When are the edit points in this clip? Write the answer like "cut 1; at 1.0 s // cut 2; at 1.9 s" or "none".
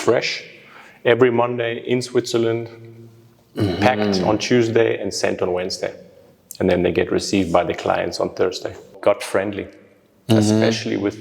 cut 1; at 8.9 s